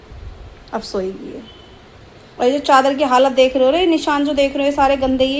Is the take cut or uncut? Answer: uncut